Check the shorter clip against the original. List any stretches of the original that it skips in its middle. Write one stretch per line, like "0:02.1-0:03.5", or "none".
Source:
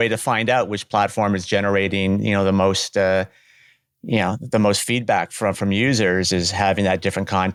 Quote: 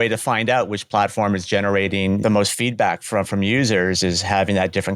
0:02.2-0:04.5